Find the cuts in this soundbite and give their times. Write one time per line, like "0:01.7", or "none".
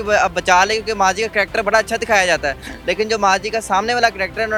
none